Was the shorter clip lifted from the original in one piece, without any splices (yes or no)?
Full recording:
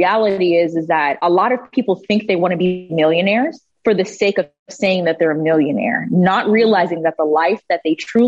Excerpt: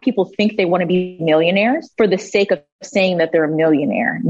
no